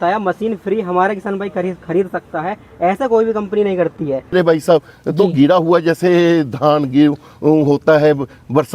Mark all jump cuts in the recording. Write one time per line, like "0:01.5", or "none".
0:04.3